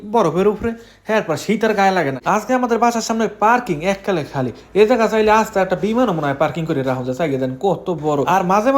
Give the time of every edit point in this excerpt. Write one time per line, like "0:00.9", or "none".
0:02.2